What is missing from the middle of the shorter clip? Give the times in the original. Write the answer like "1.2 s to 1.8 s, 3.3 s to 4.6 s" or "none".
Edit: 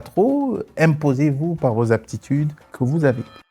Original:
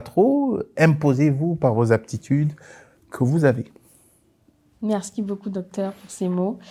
2.6 s to 3.0 s

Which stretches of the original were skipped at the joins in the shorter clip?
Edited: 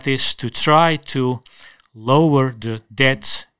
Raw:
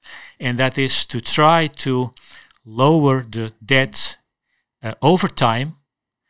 none

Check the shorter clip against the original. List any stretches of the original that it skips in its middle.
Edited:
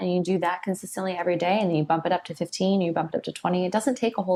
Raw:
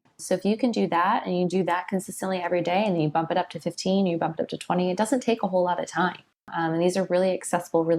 none

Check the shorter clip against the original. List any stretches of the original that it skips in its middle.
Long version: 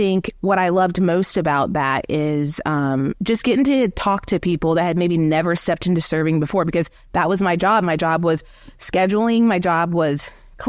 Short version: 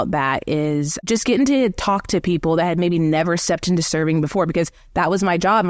2.6 s to 3.2 s

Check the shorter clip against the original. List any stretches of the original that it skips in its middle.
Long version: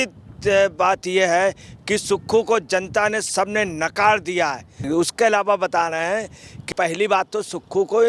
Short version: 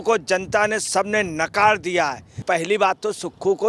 4.7 s to 6.6 s

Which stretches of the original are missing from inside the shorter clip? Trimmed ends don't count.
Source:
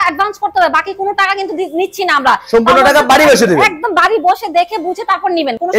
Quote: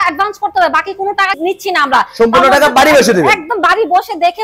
1.4 s to 1.7 s

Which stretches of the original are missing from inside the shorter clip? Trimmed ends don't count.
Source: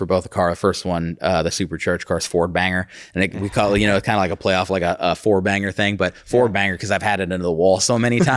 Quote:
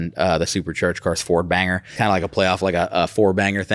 3.0 s to 4.0 s

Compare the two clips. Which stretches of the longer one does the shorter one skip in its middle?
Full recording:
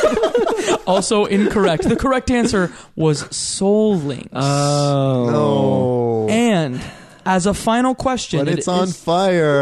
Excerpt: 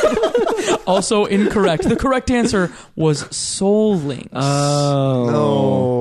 none

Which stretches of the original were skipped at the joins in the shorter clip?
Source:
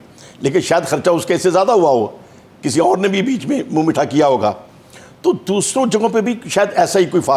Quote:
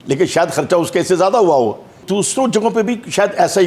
2.4 s to 5.4 s

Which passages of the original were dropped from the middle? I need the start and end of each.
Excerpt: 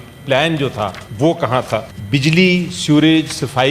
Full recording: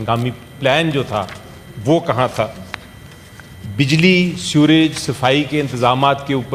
1.4 s to 1.7 s, 2.6 s to 3.6 s

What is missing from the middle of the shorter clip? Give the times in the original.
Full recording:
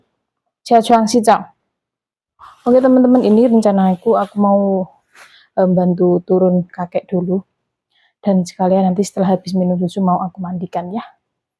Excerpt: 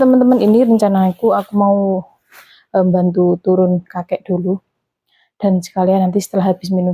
none

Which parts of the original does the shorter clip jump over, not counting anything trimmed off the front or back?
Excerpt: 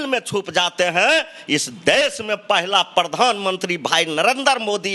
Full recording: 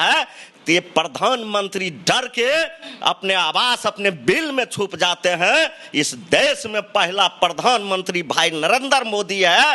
none

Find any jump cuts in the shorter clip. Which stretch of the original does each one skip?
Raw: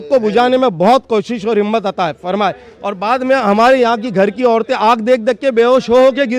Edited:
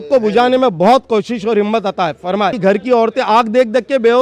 2.6 s to 4.1 s

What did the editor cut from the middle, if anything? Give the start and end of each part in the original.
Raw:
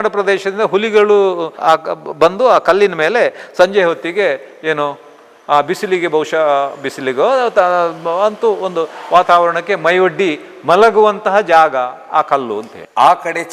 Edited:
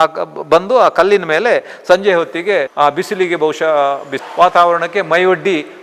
4.4 s to 5.4 s, 6.9 s to 9.0 s

